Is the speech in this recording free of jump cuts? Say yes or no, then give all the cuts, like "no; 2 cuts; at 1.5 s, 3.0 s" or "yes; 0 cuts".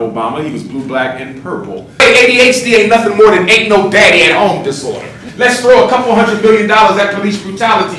no; 2 cuts; at 1.9 s, 5.2 s